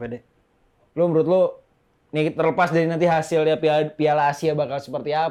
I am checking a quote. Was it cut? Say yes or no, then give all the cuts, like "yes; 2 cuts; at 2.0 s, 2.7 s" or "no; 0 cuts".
no; 0 cuts